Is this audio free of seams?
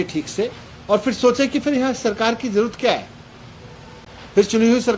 yes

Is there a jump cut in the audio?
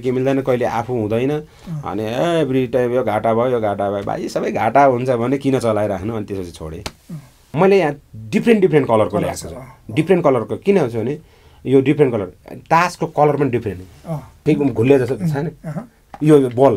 yes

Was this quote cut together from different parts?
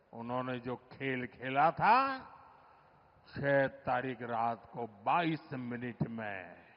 no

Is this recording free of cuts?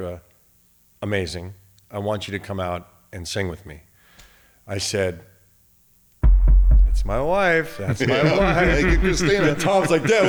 yes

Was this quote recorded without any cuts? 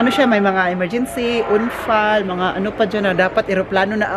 yes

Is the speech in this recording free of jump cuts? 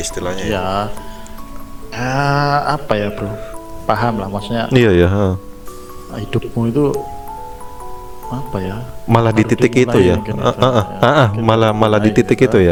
yes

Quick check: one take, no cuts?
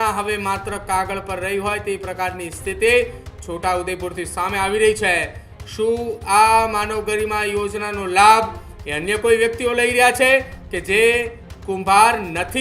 yes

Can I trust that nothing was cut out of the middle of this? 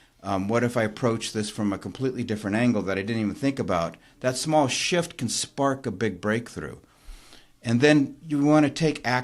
yes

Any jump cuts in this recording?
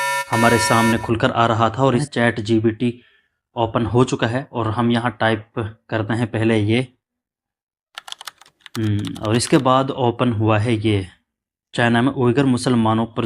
yes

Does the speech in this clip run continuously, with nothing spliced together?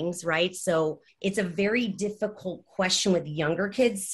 no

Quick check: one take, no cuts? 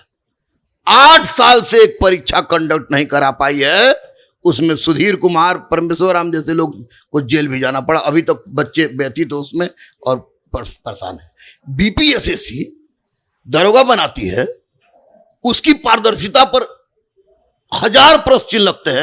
yes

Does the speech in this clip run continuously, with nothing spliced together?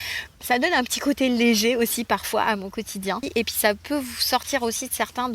no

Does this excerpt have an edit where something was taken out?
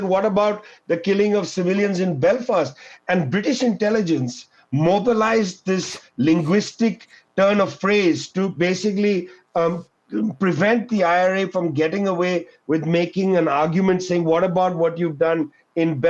no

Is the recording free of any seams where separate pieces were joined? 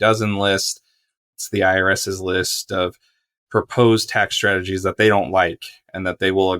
no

